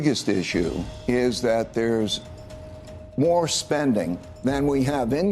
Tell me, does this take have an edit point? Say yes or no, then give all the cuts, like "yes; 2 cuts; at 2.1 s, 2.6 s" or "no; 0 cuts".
yes; 2 cuts; at 0.9 s, 4.2 s